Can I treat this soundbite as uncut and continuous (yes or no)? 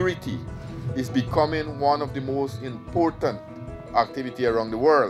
no